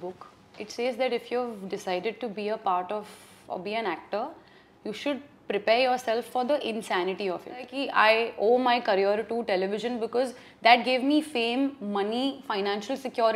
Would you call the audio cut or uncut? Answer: cut